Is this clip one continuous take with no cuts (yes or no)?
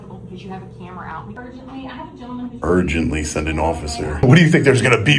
no